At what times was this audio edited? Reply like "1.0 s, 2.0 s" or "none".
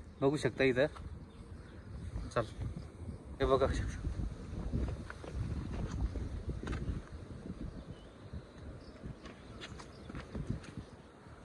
3.4 s